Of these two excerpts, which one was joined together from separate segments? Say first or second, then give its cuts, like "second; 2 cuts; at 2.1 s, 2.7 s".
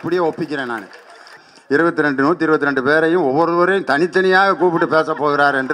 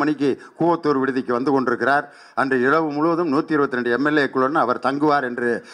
first; 1 cut; at 1.4 s